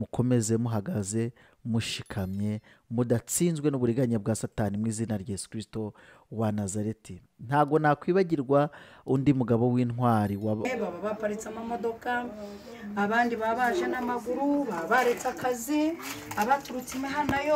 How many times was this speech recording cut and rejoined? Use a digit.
1